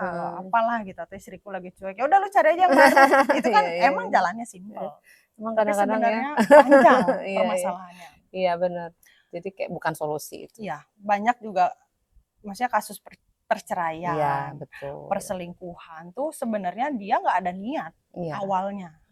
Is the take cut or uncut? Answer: uncut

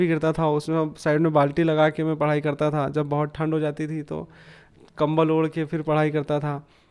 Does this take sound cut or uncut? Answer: uncut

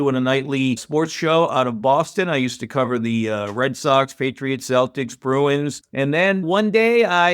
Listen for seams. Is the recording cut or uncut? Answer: cut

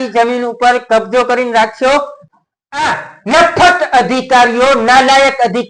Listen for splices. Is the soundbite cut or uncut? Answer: cut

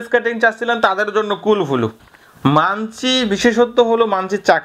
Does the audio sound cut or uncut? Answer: cut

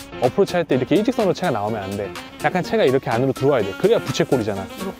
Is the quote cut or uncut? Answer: uncut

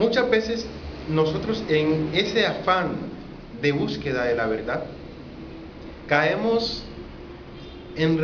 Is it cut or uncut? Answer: cut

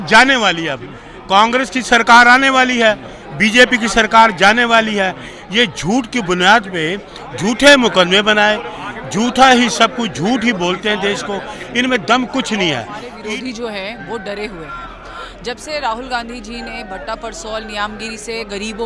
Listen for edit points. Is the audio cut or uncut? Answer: cut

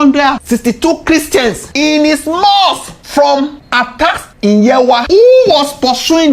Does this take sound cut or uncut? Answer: cut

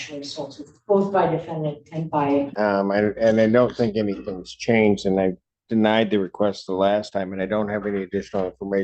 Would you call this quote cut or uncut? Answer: cut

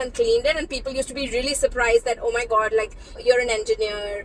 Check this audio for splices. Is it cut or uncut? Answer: cut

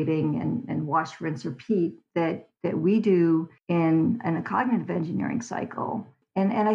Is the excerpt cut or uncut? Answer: cut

